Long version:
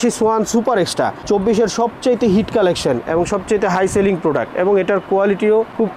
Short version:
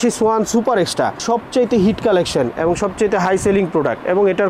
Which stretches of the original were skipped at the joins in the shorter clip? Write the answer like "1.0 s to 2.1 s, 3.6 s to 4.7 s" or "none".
1.2 s to 1.7 s